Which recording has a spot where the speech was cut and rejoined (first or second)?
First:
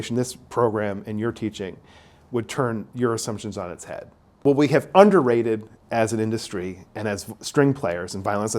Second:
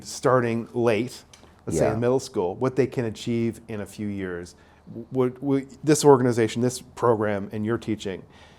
first